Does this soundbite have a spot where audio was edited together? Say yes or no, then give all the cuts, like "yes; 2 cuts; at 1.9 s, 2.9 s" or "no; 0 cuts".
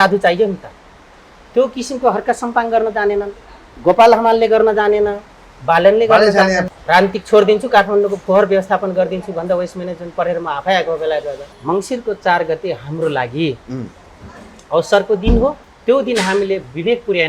yes; 3 cuts; at 6.6 s, 11.5 s, 15.7 s